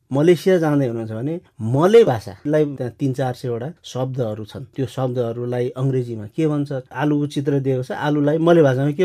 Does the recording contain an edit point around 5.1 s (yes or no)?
no